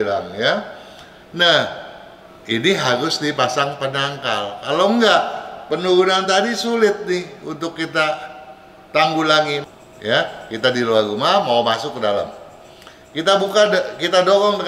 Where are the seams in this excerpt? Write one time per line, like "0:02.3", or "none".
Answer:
0:09.6